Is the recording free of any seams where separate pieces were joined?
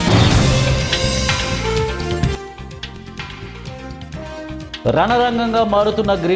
yes; 0 cuts

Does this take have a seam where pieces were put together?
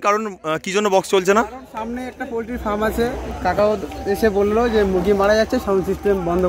no; 0 cuts

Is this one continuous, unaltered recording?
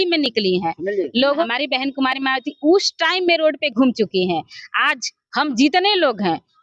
no; 1 cut; at 1.5 s

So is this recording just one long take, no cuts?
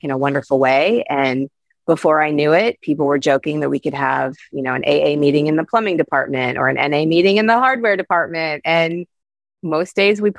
yes; 0 cuts

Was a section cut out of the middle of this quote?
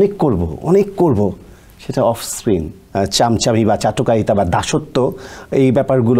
yes; 1 cut; at 2.8 s

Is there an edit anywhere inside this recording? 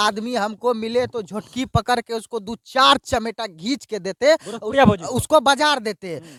no; 0 cuts

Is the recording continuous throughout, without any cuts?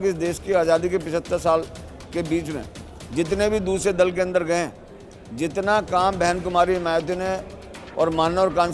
yes; 0 cuts

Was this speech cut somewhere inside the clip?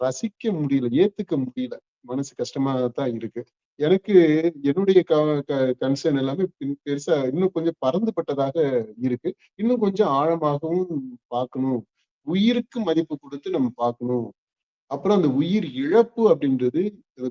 no; 0 cuts

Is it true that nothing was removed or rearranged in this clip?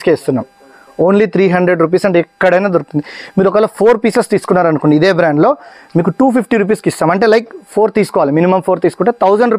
yes; 0 cuts

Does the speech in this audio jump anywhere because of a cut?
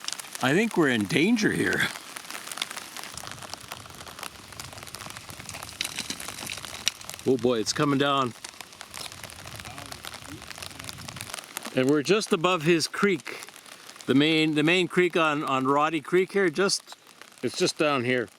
yes; 2 cuts; at 3.1 s, 11.3 s

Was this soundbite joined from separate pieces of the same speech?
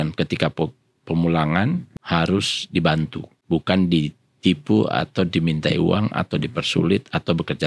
yes; 2 cuts; at 1.9 s, 3.3 s

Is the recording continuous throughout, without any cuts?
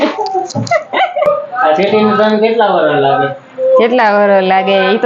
no; 1 cut; at 1.3 s

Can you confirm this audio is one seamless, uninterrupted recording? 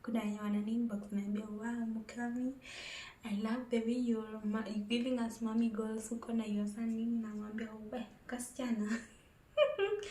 yes; 0 cuts

